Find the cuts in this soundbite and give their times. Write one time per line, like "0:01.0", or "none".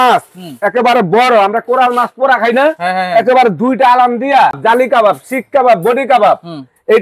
0:04.6